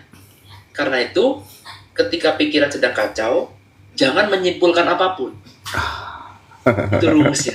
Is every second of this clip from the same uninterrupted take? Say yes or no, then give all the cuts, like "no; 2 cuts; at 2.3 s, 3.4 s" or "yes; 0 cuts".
yes; 0 cuts